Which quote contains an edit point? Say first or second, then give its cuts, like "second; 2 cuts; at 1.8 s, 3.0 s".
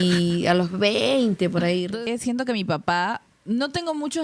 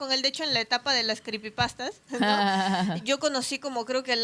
first; 2 cuts; at 1.9 s, 3.3 s